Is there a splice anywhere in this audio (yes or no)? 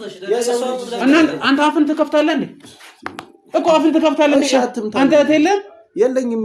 no